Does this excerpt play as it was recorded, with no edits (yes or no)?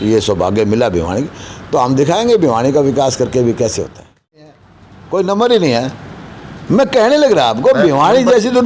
no